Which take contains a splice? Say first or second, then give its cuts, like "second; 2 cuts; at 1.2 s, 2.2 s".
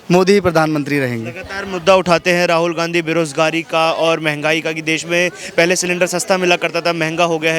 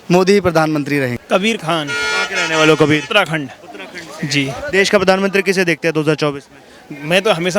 second; 1 cut; at 1.2 s